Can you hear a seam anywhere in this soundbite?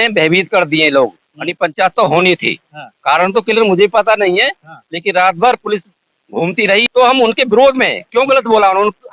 yes; 1 cut; at 6.8 s

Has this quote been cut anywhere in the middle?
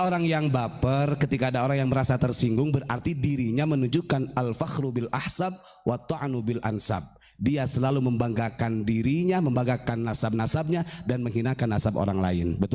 no; 0 cuts

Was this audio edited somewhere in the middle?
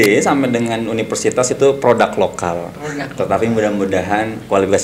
no; 0 cuts

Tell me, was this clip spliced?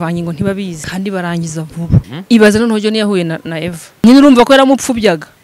yes; 3 cuts; at 0.8 s, 2.1 s, 4.0 s

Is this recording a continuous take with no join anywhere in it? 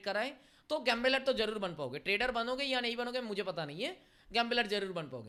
yes; 0 cuts

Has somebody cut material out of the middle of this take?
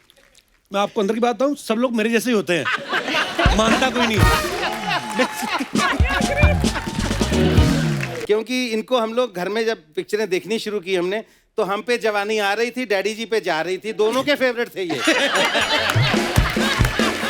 yes; 1 cut; at 8.1 s

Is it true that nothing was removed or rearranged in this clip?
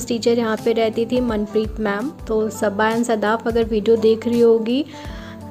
no; 1 cut; at 2.1 s

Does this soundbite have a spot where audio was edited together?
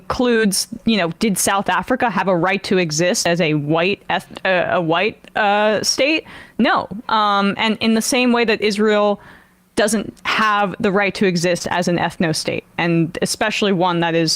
yes; 1 cut; at 12.7 s

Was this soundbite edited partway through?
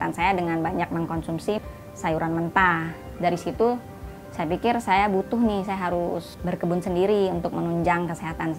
yes; 3 cuts; at 1.6 s, 3.0 s, 6.3 s

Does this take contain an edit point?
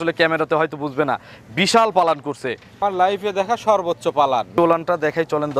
yes; 2 cuts; at 2.8 s, 4.5 s

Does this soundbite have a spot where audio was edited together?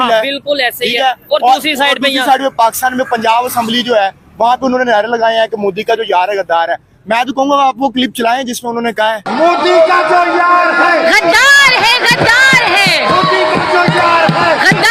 no; 0 cuts

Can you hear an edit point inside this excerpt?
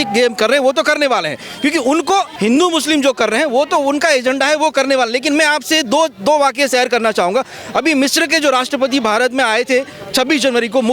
yes; 1 cut; at 2.3 s

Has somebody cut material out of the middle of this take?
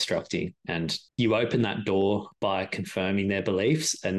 yes; 2 cuts; at 0.9 s, 2.3 s

